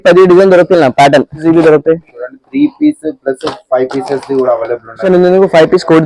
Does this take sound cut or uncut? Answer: cut